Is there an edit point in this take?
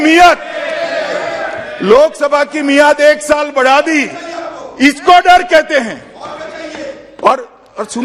no; 0 cuts

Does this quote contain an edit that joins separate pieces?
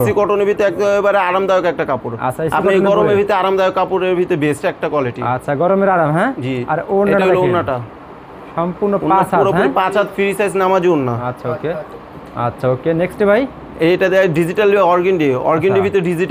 no; 0 cuts

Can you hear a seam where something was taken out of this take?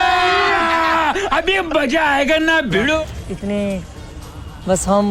yes; 1 cut; at 3.2 s

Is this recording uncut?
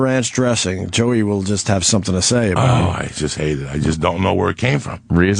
no; 1 cut; at 3.6 s

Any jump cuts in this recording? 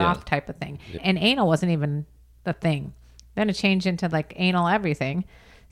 yes; 1 cut; at 1.0 s

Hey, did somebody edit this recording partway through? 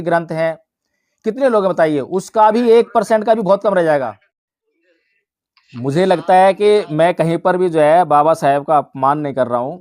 yes; 1 cut; at 5.0 s

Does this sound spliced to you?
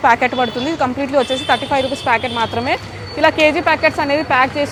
no; 0 cuts

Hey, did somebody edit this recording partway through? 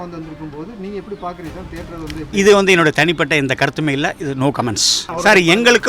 yes; 1 cut; at 5.0 s

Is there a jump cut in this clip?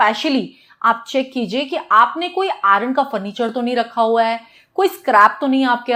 no; 0 cuts

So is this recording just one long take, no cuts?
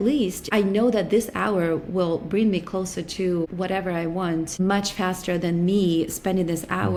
yes; 0 cuts

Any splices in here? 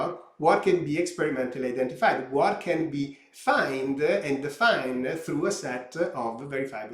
no; 0 cuts

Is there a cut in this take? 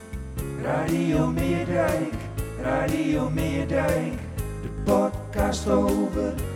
no; 0 cuts

